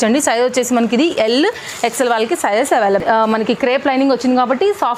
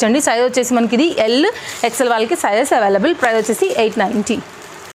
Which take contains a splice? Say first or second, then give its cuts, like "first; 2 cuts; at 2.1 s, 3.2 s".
first; 1 cut; at 3.0 s